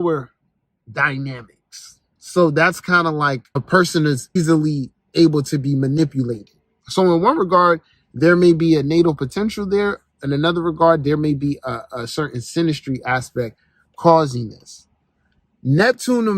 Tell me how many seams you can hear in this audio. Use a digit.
2